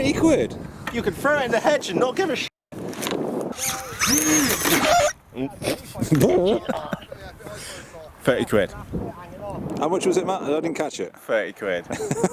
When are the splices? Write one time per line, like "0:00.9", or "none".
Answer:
0:03.6